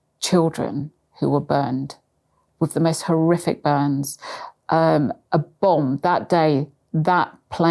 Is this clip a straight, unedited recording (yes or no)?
yes